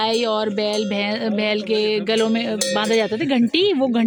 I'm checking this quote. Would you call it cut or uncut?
uncut